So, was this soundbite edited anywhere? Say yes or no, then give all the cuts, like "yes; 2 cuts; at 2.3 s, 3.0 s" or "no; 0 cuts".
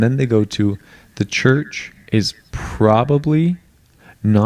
no; 0 cuts